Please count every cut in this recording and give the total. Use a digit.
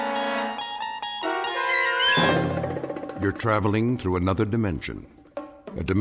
1